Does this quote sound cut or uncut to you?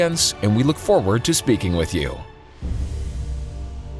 cut